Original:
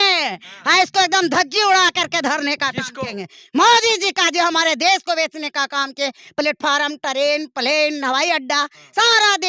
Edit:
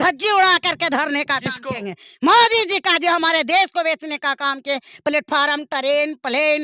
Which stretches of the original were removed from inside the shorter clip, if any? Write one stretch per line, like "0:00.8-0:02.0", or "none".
none

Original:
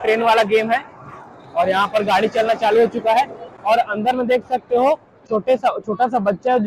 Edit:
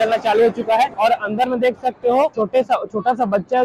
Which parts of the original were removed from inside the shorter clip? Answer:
0:03.3-0:03.6
0:05.0-0:05.3

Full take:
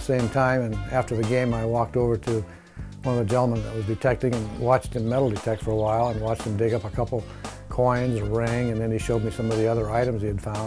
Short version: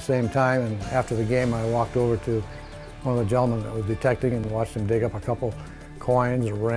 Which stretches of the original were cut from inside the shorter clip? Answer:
0:04.5-0:06.2

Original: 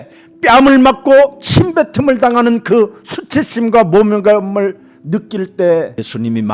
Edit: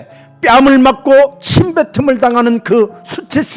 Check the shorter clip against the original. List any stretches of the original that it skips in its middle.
none

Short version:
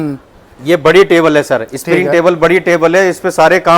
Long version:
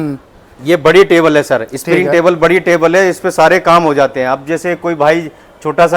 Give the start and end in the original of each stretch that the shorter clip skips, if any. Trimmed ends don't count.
none

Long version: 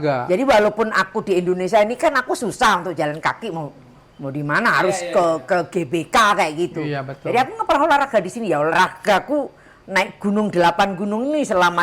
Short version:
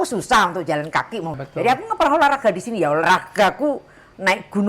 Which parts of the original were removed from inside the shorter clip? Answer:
0:03.7-0:07.1

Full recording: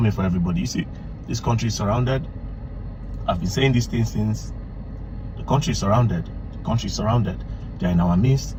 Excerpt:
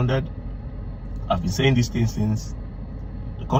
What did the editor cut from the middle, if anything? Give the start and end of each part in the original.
none

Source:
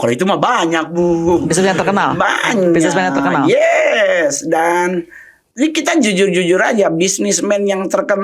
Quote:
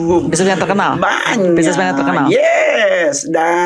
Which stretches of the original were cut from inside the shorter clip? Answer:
none

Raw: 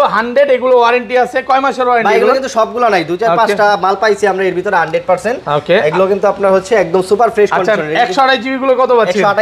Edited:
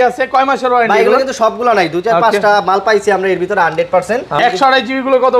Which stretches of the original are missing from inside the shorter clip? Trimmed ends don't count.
0:05.5-0:07.9

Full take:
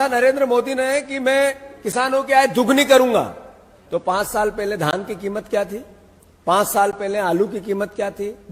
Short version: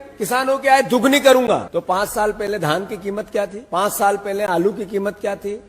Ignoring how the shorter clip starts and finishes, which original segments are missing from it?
0:03.3-0:03.8
0:05.8-0:06.3

